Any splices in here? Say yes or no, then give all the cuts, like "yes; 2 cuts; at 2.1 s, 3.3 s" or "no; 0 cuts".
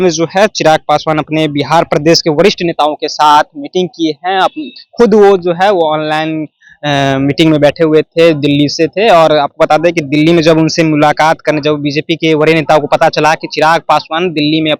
no; 0 cuts